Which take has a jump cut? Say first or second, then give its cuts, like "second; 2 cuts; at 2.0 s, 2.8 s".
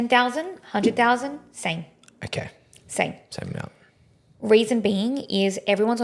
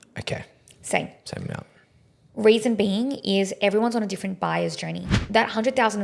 second; 1 cut; at 5.1 s